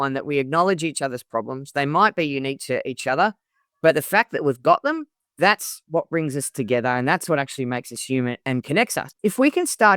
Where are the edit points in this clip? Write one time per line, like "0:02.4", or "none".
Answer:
0:09.0